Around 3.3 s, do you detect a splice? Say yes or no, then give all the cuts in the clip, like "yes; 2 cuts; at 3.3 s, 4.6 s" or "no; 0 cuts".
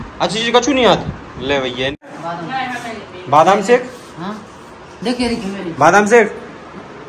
no; 1 cut; at 2.1 s